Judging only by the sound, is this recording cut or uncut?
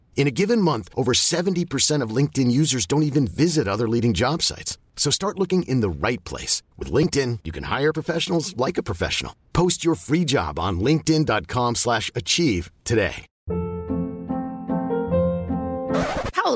cut